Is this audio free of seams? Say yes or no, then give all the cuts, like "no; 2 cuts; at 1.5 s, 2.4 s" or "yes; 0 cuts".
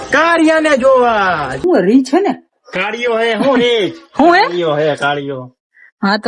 yes; 0 cuts